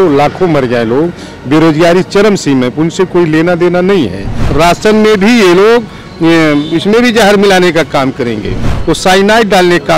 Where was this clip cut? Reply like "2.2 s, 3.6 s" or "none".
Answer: 4.4 s, 8.7 s